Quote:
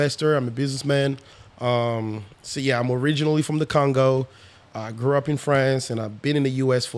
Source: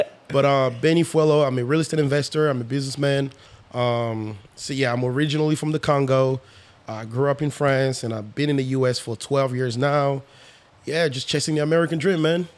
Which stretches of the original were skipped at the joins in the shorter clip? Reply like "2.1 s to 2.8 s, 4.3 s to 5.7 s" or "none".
none